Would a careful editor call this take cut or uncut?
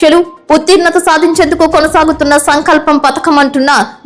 uncut